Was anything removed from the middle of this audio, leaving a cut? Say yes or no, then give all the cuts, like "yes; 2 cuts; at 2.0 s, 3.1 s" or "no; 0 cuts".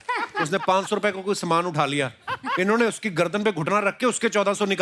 no; 0 cuts